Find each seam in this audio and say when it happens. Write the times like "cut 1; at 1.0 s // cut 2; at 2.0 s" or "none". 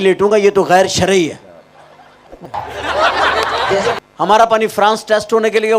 cut 1; at 2.4 s // cut 2; at 4.0 s